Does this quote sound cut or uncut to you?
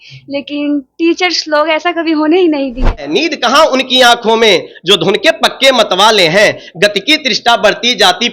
cut